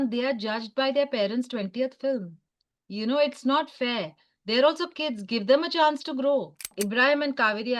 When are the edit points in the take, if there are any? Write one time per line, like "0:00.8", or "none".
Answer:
0:06.7